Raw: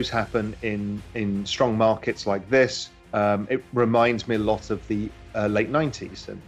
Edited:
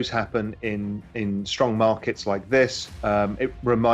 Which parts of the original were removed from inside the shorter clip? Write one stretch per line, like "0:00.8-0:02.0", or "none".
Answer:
0:02.9-0:03.0